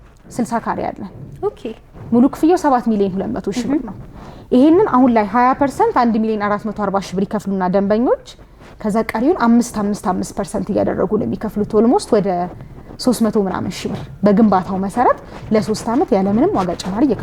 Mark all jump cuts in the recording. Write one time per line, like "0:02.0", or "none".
none